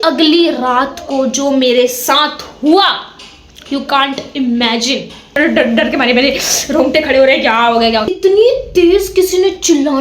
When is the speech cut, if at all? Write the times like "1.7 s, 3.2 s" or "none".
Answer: 5.4 s, 8.1 s